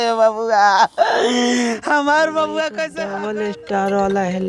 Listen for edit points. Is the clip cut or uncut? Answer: cut